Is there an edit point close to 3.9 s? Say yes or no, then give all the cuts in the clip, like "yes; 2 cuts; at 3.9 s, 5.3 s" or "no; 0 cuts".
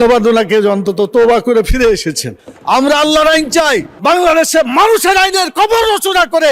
yes; 1 cut; at 3.9 s